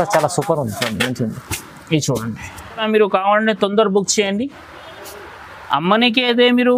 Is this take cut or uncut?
cut